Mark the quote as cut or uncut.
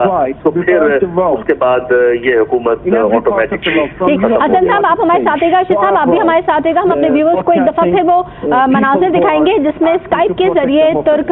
uncut